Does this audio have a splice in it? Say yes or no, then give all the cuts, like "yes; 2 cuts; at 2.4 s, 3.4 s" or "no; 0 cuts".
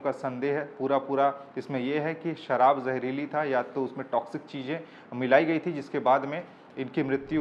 no; 0 cuts